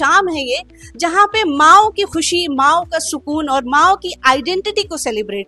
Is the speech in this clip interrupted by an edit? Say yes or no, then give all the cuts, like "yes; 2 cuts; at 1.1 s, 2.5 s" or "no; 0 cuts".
no; 0 cuts